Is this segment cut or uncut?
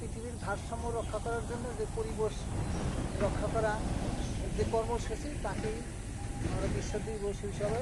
uncut